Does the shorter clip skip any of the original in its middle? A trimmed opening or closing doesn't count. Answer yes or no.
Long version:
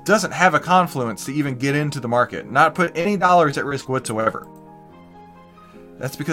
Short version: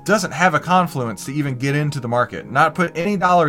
no